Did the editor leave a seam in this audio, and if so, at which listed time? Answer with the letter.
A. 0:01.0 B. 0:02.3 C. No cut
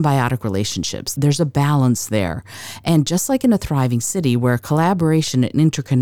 A